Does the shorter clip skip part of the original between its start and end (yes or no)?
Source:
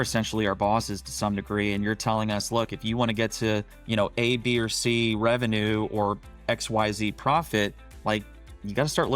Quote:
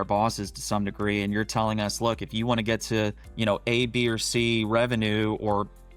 no